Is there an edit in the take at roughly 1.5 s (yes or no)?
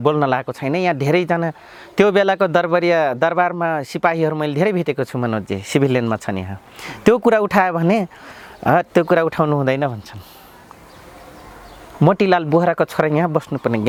no